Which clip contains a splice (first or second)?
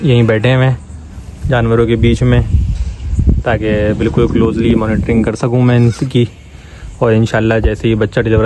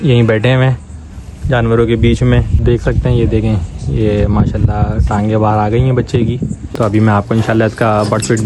second